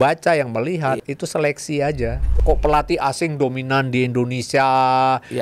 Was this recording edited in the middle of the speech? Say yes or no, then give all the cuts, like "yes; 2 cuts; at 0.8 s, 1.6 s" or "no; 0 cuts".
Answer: yes; 2 cuts; at 1.0 s, 2.3 s